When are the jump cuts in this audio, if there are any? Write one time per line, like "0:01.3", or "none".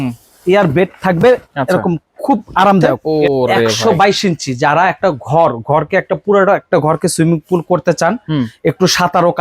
0:03.0